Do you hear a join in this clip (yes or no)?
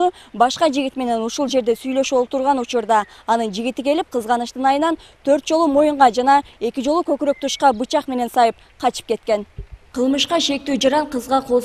no